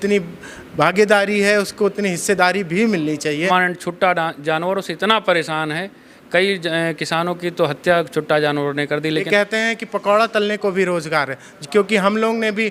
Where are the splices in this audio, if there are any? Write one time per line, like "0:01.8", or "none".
0:03.5
0:09.3